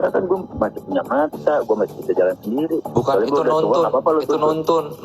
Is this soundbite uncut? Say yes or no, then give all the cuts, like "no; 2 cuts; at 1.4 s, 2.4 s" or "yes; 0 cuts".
yes; 0 cuts